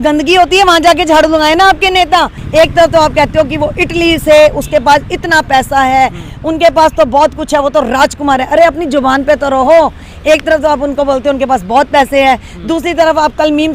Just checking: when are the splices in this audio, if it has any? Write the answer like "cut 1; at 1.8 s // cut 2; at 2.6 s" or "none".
cut 1; at 2.4 s